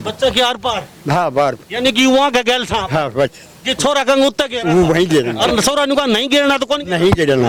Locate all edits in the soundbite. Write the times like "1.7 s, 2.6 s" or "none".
none